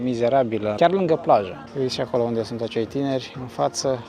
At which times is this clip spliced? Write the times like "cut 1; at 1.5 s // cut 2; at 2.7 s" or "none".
cut 1; at 0.8 s // cut 2; at 1.6 s